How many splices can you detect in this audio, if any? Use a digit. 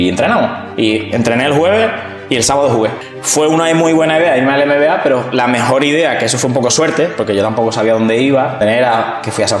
2